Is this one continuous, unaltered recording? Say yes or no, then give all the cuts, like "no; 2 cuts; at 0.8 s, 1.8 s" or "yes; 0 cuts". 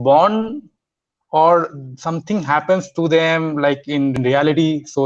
no; 1 cut; at 4.1 s